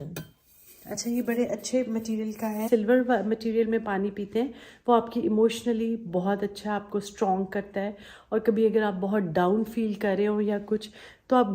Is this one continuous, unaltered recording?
no; 1 cut; at 2.7 s

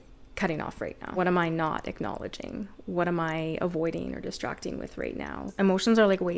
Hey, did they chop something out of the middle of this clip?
yes; 2 cuts; at 1.1 s, 5.5 s

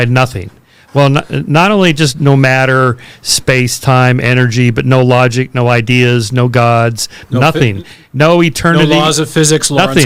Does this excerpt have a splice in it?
no; 0 cuts

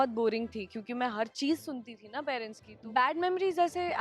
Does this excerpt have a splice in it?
yes; 1 cut; at 2.6 s

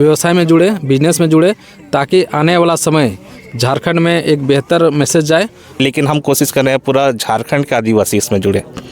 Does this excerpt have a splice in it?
yes; 1 cut; at 5.8 s

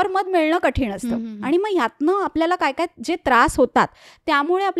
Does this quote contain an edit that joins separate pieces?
no; 0 cuts

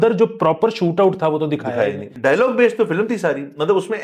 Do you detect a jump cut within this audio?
yes; 1 cut; at 2.1 s

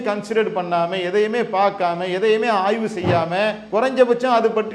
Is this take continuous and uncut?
no; 1 cut; at 3.6 s

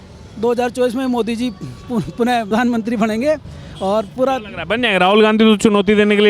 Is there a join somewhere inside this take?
no; 0 cuts

